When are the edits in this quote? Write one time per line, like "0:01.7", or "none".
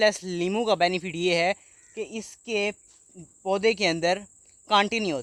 none